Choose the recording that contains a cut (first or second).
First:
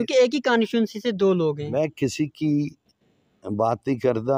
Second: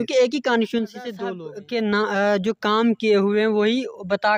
second